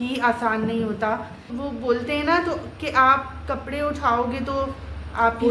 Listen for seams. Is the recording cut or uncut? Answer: cut